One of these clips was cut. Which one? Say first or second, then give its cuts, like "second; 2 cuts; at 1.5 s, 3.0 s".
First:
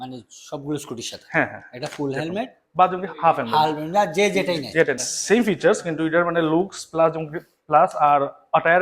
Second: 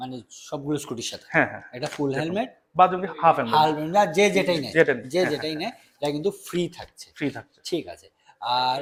first; 1 cut; at 5.0 s